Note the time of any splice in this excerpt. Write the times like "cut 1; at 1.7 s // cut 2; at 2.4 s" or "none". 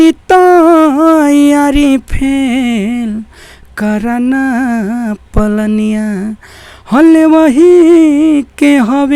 none